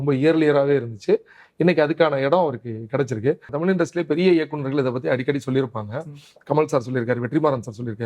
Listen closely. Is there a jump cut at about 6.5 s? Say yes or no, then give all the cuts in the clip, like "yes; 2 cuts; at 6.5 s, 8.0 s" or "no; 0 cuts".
no; 1 cut; at 3.5 s